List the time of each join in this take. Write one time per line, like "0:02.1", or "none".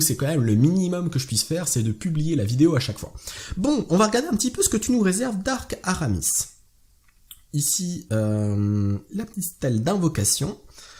none